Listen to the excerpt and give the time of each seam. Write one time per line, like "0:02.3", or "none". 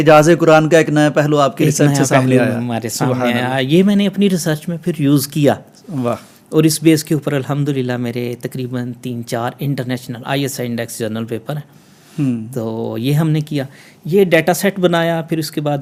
none